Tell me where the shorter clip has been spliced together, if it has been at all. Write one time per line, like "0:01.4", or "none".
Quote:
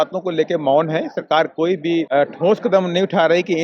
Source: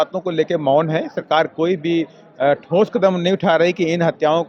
0:02.1